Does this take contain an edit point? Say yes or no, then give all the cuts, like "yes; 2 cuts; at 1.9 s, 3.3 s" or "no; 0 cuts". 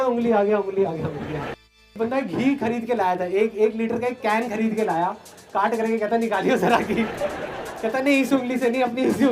yes; 1 cut; at 2.0 s